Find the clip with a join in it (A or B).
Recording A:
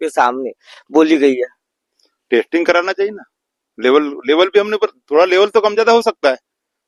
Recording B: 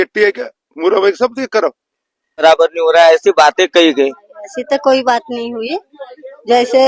B